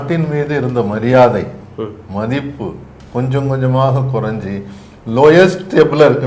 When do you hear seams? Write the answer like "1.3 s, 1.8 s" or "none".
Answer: none